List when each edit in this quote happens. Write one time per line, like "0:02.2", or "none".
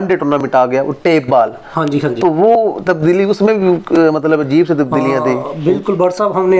none